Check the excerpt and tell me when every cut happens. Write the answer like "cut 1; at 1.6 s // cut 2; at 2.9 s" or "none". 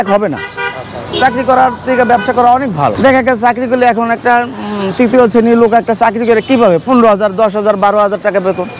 cut 1; at 1.0 s // cut 2; at 2.9 s